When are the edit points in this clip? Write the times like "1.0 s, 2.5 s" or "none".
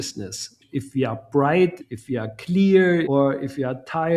3.1 s